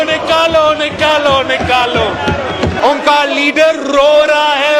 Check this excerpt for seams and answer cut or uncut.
uncut